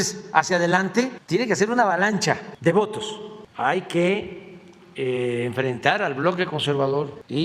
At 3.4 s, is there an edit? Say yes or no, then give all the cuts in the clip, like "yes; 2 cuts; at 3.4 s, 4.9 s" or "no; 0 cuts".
yes; 1 cut; at 3.4 s